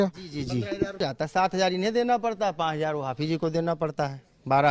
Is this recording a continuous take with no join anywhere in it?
no; 1 cut; at 1.0 s

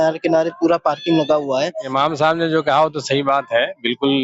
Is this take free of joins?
no; 1 cut; at 1.8 s

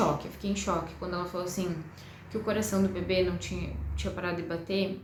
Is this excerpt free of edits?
yes; 0 cuts

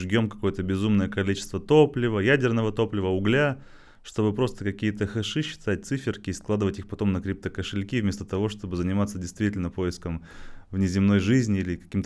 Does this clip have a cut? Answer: no; 0 cuts

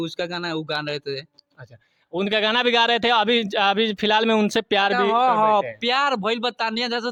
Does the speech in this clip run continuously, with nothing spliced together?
yes; 0 cuts

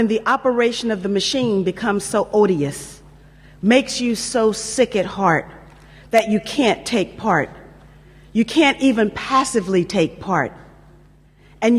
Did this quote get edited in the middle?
no; 0 cuts

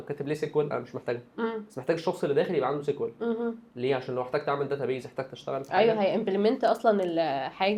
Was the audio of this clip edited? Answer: no; 0 cuts

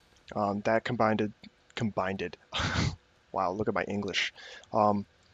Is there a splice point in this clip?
no; 0 cuts

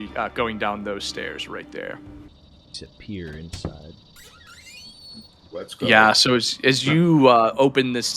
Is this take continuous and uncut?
no; 1 cut; at 2.3 s

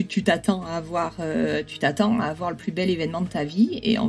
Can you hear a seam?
no; 0 cuts

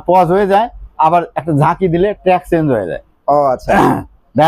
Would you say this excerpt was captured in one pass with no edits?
yes; 0 cuts

